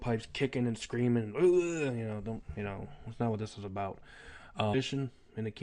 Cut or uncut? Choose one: uncut